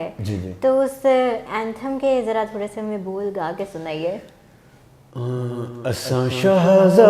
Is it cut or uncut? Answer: uncut